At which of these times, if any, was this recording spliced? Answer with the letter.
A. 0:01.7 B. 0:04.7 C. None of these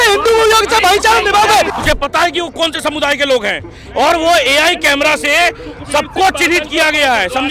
A